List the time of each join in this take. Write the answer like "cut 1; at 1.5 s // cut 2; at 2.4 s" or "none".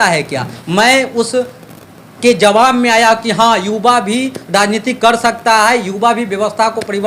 none